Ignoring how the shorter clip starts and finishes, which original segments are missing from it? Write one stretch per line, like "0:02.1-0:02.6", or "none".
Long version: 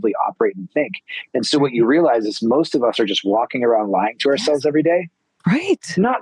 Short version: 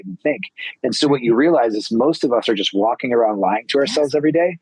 none